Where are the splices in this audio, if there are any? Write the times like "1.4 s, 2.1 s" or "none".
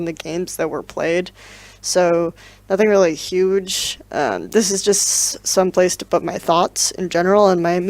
5.1 s